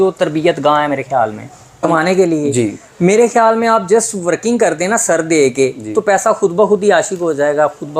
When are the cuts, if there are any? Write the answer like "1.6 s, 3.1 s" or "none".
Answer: 1.8 s